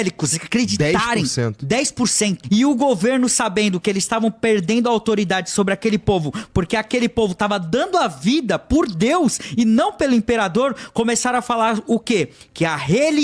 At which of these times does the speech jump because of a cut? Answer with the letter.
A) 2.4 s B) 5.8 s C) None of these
A